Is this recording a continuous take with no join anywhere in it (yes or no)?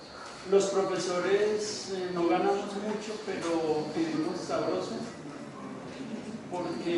yes